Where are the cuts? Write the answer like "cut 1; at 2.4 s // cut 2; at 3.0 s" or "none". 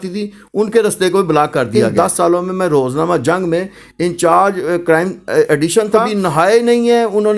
cut 1; at 1.8 s // cut 2; at 6.1 s